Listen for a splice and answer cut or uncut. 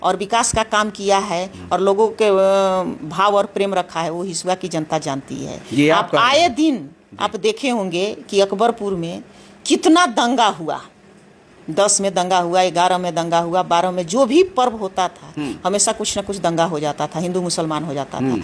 uncut